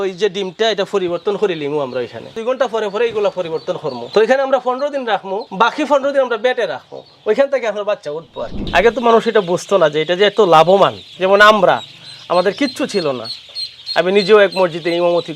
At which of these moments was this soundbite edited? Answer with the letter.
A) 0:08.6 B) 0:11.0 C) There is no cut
A